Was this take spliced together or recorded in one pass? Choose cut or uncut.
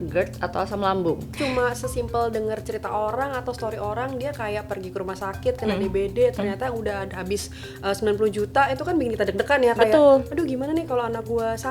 cut